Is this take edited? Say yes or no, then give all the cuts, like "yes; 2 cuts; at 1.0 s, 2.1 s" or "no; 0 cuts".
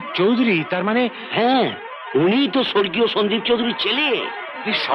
no; 0 cuts